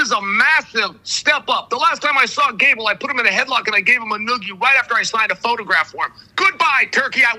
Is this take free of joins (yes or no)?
yes